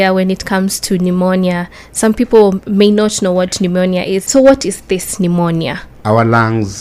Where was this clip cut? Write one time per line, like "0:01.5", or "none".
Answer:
0:04.2
0:05.9